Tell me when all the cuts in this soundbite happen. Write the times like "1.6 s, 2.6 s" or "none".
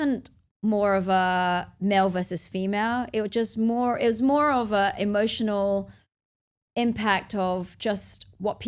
none